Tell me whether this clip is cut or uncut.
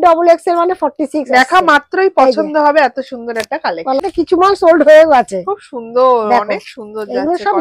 cut